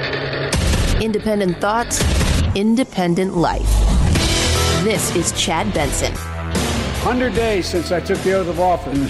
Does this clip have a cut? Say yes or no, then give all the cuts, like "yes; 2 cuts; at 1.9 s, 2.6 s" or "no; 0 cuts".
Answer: yes; 1 cut; at 7.0 s